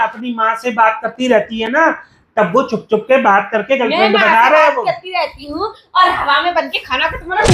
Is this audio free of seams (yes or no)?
yes